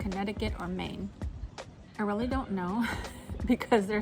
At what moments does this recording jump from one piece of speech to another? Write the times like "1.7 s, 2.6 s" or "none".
none